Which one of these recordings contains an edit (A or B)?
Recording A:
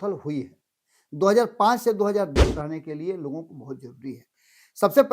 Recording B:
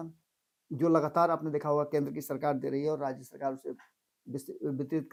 A